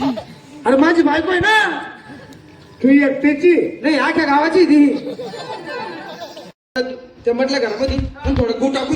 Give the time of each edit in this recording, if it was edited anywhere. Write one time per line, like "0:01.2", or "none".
0:06.8